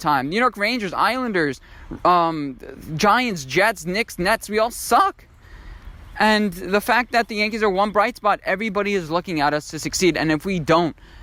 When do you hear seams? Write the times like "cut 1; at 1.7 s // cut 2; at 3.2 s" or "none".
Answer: none